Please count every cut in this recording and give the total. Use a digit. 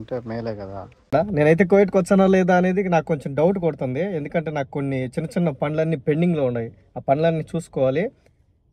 1